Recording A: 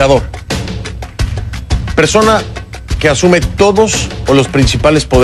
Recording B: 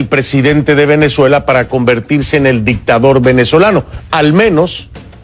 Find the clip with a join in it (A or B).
B